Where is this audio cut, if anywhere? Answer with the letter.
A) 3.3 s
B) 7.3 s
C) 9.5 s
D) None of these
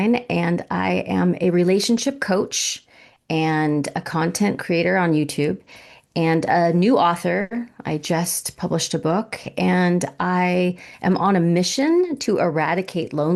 D